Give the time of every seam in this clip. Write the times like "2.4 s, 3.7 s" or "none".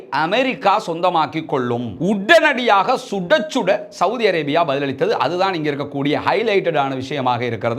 1.9 s